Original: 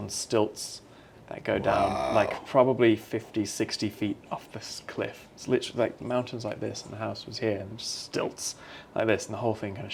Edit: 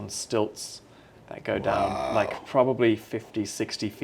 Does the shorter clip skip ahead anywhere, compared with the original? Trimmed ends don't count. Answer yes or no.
no